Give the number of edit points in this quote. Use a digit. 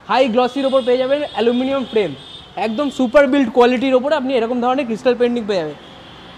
0